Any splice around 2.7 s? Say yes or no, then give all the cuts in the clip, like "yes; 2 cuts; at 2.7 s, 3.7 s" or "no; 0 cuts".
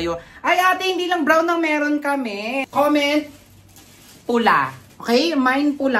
yes; 1 cut; at 2.7 s